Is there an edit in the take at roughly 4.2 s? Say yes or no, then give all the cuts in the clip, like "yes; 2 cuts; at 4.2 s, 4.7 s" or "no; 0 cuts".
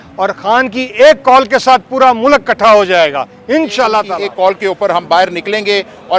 yes; 1 cut; at 4.2 s